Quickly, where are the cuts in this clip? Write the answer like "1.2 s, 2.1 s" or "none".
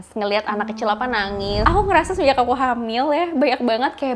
1.6 s